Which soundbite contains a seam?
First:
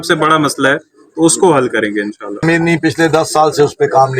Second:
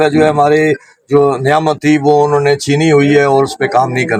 first; 1 cut; at 2.4 s

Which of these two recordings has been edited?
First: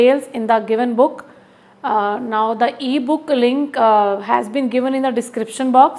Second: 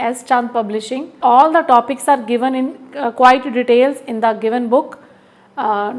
second; 1 cut; at 1.0 s

